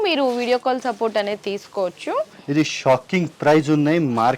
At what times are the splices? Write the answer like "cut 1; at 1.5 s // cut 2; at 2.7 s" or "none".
cut 1; at 2.4 s